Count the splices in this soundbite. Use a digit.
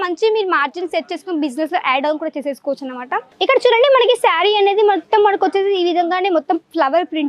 1